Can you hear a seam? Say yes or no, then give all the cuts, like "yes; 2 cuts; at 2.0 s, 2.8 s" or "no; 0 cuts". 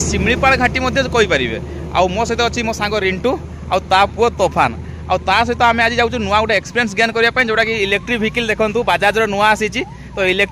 no; 0 cuts